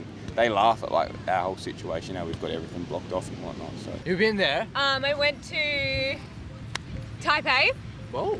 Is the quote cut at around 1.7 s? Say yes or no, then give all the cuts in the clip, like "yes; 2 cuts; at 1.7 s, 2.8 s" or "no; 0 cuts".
no; 1 cut; at 3.9 s